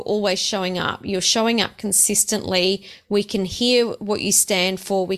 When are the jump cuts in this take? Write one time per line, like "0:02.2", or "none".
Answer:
none